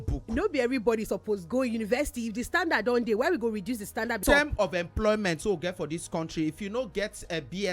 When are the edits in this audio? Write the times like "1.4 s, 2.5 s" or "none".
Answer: 4.2 s